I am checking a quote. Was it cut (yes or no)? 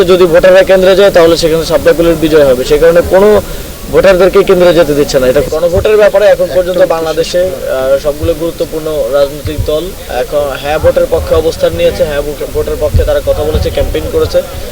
yes